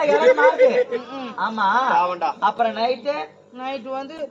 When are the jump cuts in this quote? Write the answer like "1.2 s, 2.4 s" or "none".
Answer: none